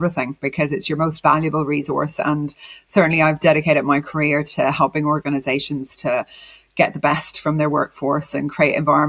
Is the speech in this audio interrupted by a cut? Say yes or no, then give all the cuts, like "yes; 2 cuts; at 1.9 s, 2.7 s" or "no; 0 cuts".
no; 0 cuts